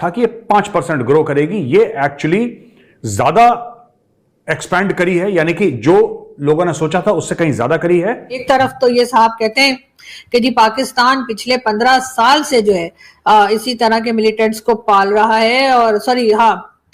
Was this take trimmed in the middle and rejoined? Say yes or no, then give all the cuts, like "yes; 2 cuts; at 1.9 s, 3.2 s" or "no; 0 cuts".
yes; 1 cut; at 8.4 s